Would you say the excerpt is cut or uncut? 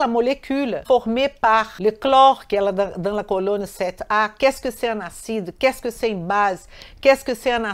cut